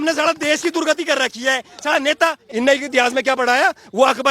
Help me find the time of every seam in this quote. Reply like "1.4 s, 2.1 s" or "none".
2.4 s

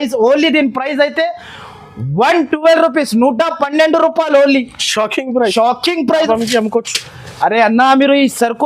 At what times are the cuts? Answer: 6.3 s

